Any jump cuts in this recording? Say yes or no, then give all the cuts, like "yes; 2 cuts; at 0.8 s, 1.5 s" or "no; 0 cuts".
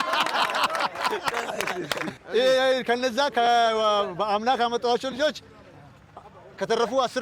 no; 0 cuts